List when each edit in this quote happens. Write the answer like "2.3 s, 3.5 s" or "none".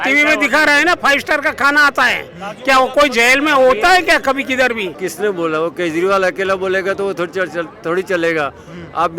5.0 s